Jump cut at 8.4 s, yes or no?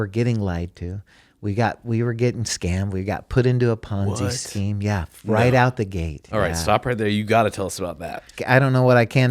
yes